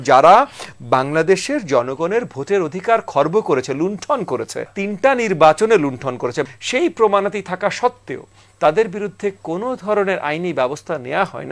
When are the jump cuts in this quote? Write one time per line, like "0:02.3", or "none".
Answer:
0:04.8
0:06.4